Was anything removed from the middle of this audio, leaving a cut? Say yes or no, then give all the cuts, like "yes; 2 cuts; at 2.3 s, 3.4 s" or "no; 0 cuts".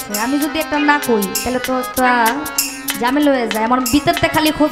no; 0 cuts